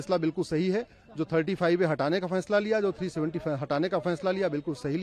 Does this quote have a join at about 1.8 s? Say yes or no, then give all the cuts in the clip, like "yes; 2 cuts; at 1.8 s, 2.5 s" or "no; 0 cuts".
no; 0 cuts